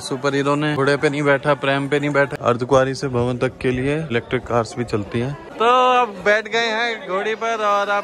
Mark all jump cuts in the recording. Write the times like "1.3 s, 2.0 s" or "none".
0.8 s, 2.4 s, 4.1 s, 5.5 s